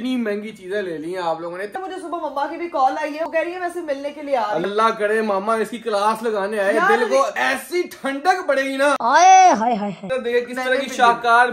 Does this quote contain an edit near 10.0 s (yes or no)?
yes